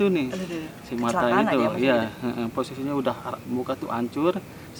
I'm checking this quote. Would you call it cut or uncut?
uncut